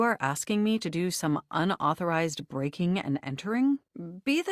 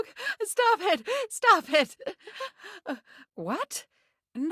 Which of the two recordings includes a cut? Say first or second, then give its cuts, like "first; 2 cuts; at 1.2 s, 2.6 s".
second; 1 cut; at 3.3 s